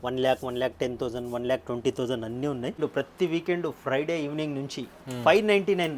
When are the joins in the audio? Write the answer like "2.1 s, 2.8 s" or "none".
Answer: 2.8 s